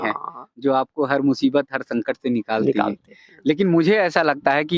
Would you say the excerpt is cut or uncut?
uncut